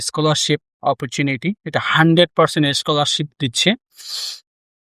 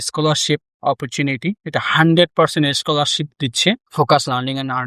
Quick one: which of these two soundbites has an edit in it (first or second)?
second